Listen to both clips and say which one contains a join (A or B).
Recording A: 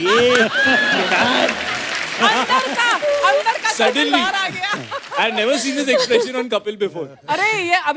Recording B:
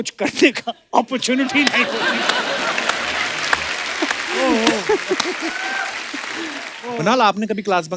B